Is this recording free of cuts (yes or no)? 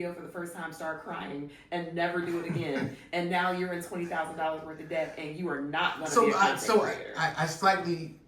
yes